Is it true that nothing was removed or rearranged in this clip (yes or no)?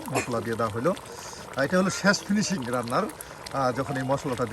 yes